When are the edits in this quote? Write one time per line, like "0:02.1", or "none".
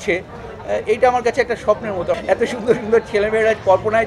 0:02.1